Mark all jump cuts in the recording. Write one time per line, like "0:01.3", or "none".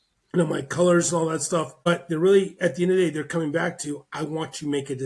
0:01.9